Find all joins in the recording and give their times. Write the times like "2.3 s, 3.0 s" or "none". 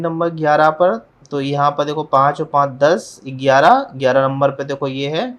none